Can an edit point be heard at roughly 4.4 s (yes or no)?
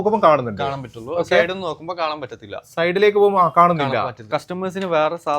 yes